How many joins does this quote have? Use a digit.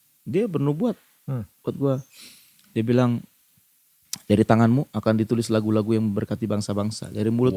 0